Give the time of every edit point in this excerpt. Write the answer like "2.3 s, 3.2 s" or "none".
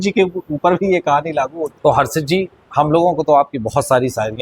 1.7 s